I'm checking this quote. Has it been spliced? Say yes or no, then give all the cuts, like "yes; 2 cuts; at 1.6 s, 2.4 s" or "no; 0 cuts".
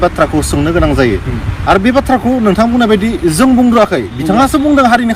no; 0 cuts